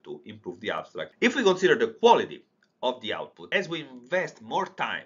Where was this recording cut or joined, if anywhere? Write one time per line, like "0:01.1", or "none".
0:01.1
0:03.4